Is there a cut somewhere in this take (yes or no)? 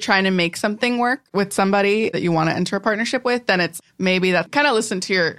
yes